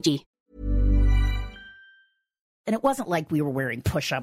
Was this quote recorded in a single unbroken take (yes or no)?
no